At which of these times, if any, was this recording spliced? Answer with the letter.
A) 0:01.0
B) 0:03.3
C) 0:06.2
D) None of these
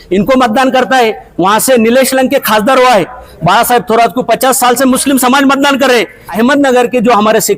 C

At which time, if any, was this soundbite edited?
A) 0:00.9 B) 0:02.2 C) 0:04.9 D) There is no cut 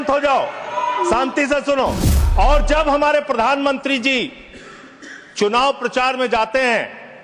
B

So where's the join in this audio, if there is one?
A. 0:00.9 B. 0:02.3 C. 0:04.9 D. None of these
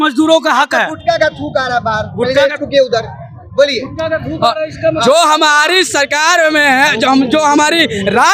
D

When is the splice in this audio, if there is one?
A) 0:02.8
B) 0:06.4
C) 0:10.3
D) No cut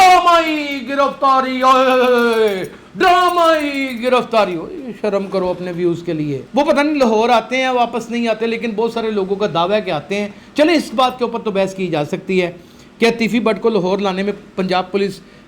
B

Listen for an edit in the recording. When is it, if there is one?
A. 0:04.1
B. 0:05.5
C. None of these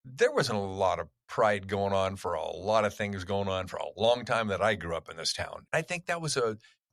B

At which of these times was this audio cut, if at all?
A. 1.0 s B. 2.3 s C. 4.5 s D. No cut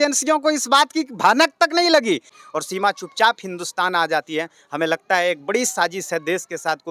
B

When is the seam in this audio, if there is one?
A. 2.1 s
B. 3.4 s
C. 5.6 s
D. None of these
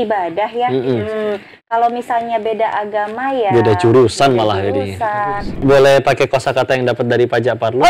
C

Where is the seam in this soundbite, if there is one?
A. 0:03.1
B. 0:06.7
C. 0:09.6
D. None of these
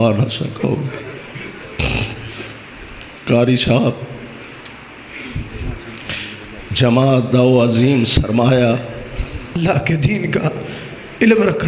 C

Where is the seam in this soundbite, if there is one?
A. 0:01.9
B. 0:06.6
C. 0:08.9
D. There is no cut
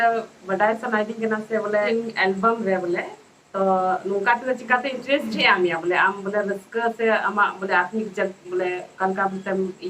A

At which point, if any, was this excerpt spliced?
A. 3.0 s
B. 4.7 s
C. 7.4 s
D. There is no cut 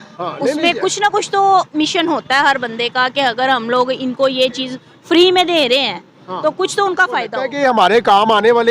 C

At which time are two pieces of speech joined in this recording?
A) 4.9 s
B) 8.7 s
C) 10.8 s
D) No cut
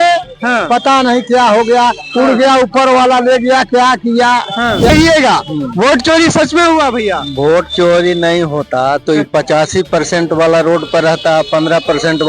A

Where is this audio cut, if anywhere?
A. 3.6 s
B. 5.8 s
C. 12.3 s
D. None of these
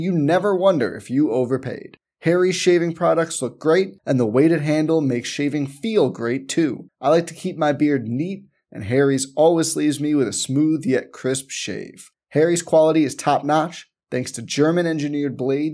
D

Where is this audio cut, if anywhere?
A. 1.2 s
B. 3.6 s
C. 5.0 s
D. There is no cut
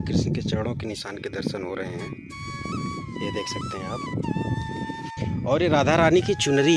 C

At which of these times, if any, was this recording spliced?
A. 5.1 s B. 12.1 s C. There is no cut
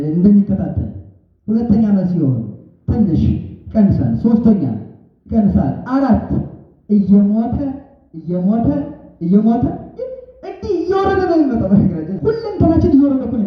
B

